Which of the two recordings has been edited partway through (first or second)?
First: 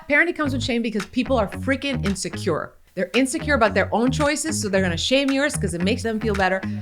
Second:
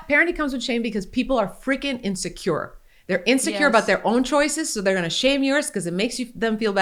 first